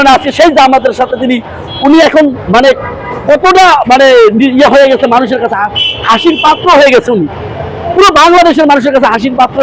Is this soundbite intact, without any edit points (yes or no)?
yes